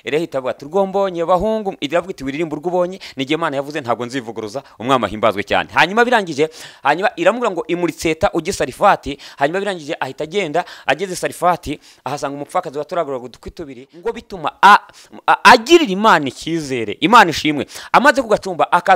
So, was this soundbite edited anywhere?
yes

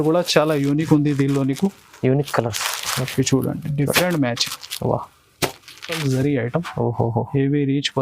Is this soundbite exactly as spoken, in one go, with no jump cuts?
no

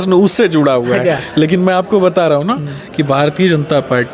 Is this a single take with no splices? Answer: yes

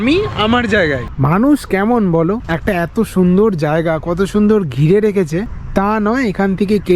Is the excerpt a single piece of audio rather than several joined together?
no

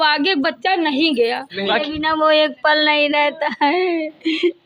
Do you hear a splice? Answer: yes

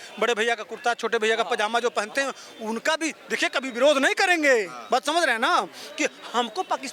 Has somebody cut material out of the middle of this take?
no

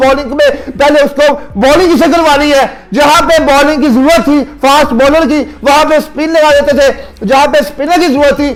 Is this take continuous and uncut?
yes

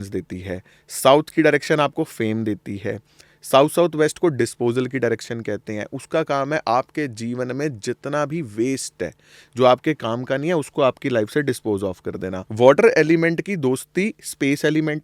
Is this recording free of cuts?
no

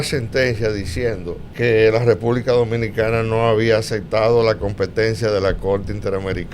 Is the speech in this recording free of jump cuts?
no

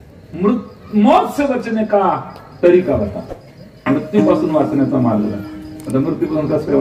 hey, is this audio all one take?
yes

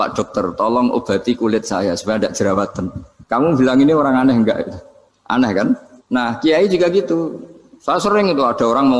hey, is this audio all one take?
yes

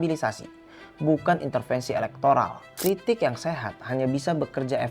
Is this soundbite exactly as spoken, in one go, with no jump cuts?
no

